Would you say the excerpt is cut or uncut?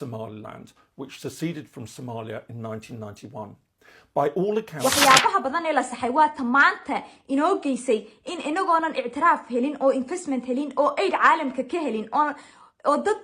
cut